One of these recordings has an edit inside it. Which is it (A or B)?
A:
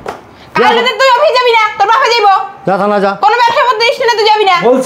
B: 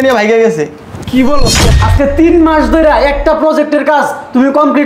B